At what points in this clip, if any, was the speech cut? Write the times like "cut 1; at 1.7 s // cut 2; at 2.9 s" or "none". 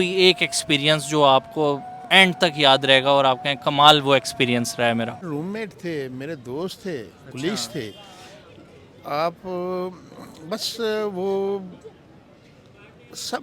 cut 1; at 5.2 s